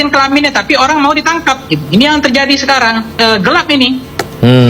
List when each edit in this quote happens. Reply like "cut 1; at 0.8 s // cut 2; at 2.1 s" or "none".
cut 1; at 3.1 s